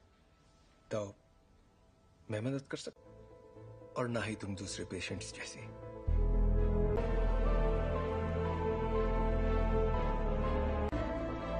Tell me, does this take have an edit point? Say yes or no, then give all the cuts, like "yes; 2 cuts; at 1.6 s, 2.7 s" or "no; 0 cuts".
yes; 1 cut; at 7.0 s